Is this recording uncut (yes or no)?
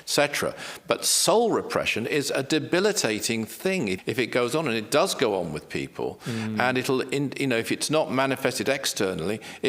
no